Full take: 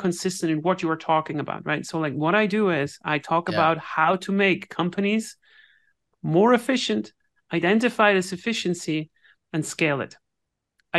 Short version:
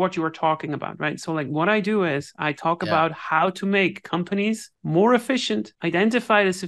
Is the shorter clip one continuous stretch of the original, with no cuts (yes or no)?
no